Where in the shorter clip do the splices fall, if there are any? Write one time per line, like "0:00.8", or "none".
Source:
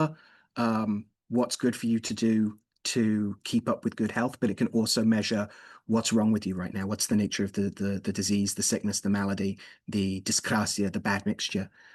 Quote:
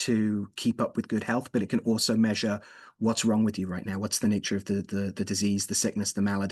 none

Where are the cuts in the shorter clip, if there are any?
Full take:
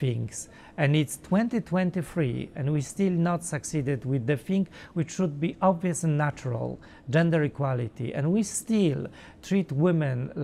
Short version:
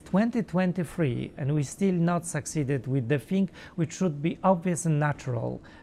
none

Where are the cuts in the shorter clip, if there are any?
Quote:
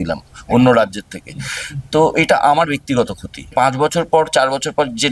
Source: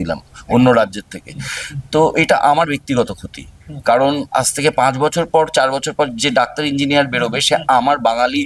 0:03.5

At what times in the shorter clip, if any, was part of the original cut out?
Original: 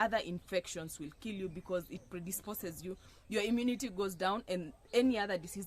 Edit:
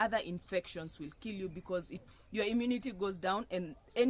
0:02.1

